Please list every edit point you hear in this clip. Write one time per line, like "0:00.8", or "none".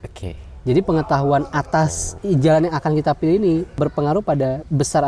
0:02.2
0:03.8